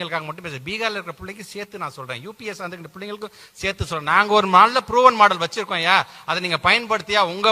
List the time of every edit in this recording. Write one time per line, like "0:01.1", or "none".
none